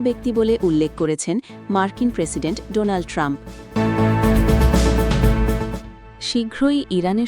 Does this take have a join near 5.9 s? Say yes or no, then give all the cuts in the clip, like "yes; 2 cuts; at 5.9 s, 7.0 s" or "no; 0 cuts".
no; 1 cut; at 3.6 s